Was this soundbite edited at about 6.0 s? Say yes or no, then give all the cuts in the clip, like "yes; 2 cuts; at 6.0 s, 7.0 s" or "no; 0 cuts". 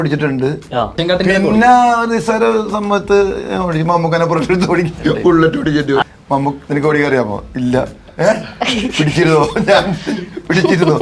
yes; 2 cuts; at 1.0 s, 6.0 s